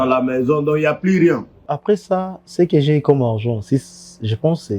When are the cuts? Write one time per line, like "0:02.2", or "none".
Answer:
0:01.7